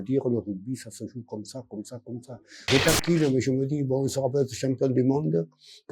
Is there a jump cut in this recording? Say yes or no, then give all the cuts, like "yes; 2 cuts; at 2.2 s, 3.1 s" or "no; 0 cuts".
yes; 1 cut; at 2.7 s